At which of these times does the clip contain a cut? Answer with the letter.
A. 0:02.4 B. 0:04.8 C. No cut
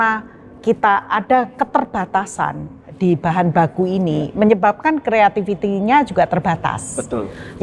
C